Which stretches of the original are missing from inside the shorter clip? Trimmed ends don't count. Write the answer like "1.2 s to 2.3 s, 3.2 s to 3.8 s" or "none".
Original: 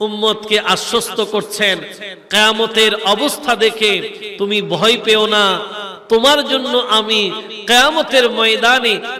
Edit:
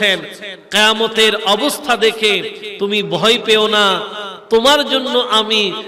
none